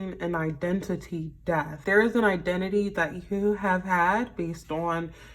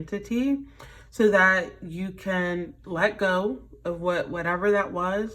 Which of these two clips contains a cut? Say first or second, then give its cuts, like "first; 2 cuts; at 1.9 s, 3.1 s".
first; 1 cut; at 1.8 s